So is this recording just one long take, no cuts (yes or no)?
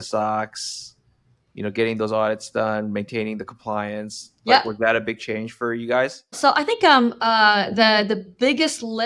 no